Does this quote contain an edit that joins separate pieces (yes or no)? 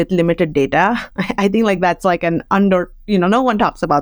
no